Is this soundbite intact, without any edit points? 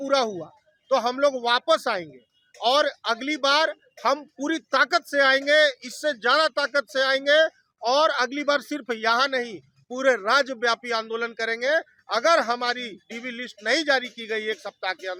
yes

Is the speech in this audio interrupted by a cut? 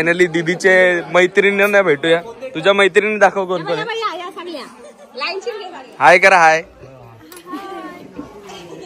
no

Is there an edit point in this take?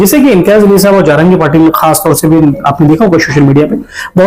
no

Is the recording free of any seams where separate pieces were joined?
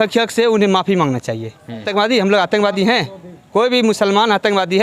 no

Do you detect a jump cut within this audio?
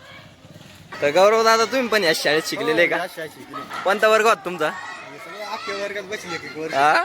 yes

